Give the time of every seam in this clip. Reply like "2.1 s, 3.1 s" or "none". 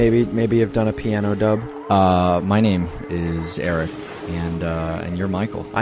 none